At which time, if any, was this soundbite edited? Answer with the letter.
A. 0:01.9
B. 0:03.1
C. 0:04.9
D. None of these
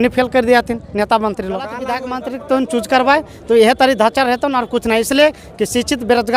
A